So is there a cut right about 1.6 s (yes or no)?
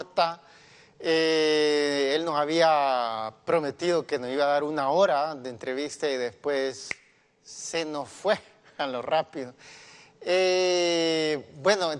no